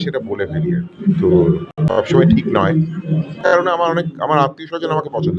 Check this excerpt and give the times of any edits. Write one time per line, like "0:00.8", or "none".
0:01.7
0:03.3